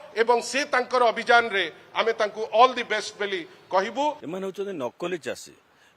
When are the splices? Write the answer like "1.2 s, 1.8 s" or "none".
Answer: 4.2 s